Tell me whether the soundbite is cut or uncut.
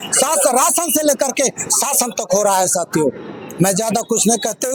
uncut